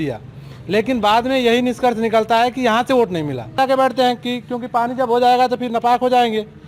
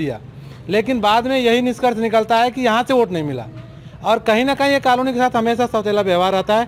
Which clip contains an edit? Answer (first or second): first